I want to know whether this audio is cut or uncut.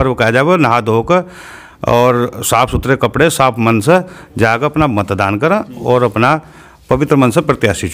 uncut